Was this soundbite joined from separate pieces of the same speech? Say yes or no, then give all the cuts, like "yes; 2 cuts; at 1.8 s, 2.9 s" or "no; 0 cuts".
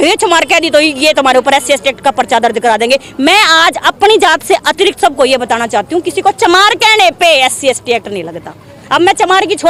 no; 0 cuts